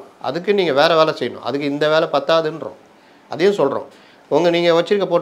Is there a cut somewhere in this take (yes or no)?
no